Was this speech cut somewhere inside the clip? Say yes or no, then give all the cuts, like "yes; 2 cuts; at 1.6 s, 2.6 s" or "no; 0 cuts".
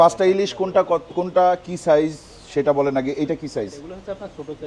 no; 0 cuts